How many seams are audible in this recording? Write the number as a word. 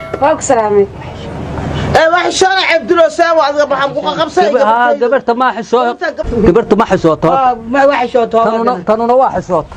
one